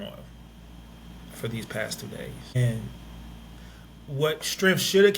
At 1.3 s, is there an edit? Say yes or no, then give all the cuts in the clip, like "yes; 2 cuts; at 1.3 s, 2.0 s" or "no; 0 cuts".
no; 1 cut; at 2.6 s